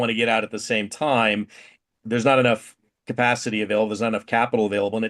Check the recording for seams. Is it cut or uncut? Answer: cut